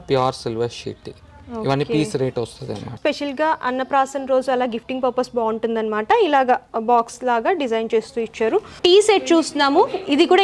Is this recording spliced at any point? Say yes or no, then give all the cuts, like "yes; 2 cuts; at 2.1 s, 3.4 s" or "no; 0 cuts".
yes; 2 cuts; at 2.9 s, 8.7 s